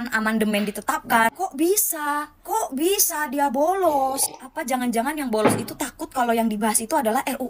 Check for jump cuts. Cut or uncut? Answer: uncut